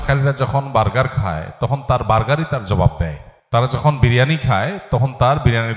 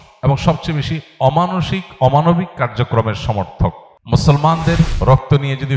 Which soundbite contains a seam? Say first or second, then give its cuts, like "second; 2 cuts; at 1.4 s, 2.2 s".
second; 2 cuts; at 3.9 s, 5.0 s